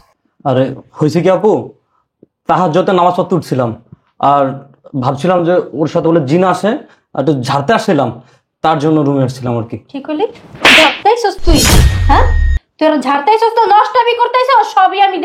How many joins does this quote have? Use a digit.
0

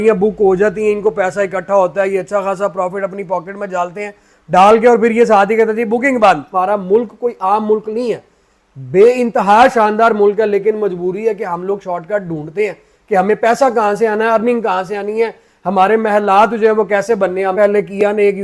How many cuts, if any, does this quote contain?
2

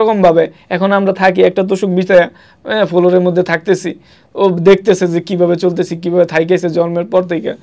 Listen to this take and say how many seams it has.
0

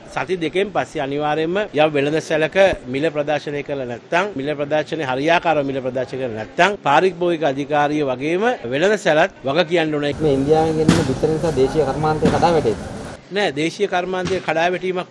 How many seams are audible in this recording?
4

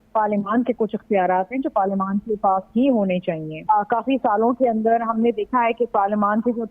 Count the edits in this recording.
1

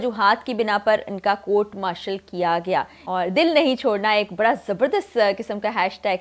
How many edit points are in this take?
1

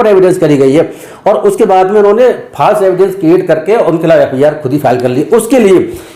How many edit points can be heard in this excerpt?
0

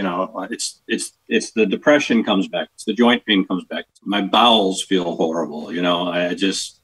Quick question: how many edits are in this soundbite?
1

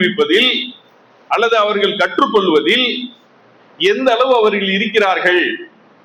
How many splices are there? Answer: 0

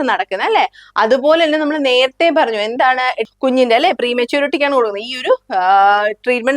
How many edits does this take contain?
1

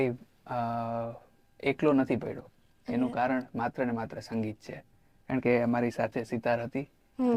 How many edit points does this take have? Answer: 0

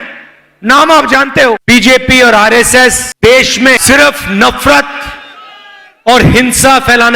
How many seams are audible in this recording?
3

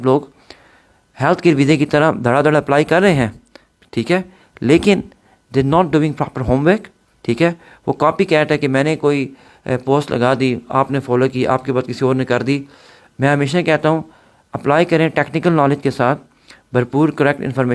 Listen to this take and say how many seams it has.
0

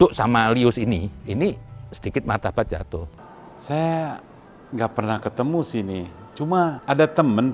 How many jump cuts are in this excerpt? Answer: 0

